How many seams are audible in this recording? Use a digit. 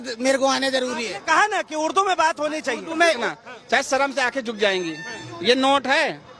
1